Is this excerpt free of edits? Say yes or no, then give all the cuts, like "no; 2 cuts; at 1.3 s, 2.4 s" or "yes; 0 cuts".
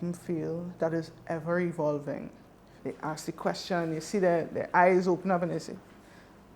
no; 1 cut; at 2.8 s